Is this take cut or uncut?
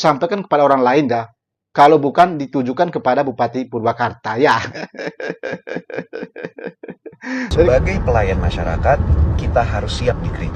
cut